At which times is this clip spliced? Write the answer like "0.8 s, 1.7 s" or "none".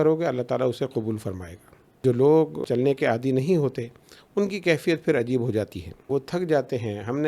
1.9 s, 2.6 s, 6.0 s